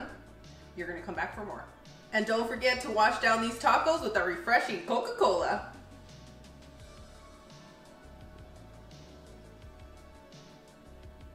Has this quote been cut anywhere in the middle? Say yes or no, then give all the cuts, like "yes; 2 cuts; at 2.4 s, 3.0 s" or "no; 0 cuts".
no; 0 cuts